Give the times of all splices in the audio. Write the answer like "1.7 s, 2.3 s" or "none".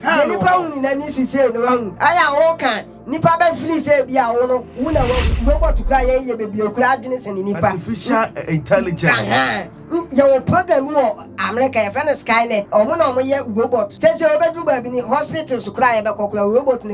1.9 s, 5.3 s, 12.7 s, 13.9 s